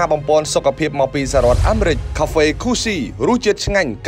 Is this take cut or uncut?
cut